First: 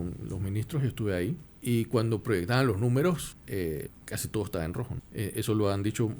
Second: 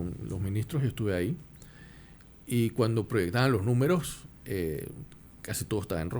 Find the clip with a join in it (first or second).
first